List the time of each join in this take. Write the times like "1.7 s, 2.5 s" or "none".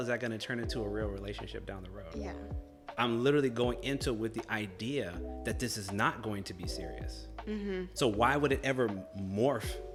none